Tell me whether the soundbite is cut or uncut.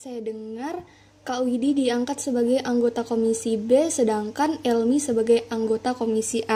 uncut